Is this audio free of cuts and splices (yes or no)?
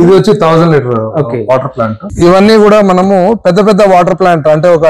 no